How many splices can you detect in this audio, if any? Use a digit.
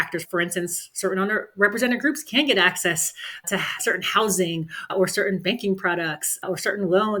0